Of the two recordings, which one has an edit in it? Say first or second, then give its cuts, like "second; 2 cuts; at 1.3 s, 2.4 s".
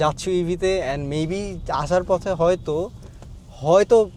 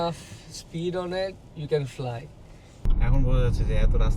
second; 1 cut; at 2.8 s